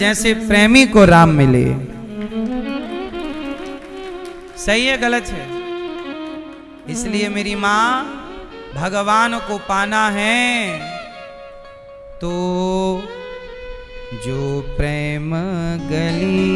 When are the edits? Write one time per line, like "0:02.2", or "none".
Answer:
none